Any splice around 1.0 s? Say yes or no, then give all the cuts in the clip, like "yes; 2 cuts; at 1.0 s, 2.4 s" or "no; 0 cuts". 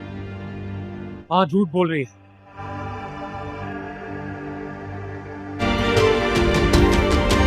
yes; 1 cut; at 1.0 s